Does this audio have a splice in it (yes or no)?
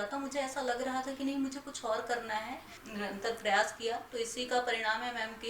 yes